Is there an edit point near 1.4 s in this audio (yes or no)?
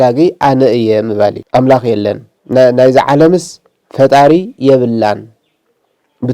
yes